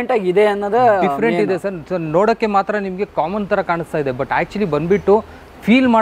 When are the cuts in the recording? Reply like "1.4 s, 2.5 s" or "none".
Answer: none